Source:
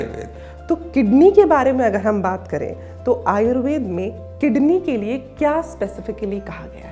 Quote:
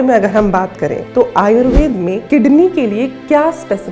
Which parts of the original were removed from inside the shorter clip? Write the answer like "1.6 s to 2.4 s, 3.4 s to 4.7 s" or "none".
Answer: 2.7 s to 2.9 s, 4.1 s to 4.3 s